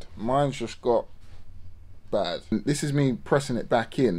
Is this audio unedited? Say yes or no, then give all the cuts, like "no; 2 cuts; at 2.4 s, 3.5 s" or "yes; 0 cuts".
no; 1 cut; at 2.5 s